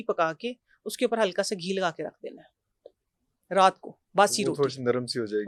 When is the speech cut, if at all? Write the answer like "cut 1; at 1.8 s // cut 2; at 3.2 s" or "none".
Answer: none